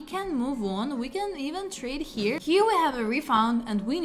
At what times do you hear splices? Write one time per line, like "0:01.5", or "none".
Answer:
0:02.4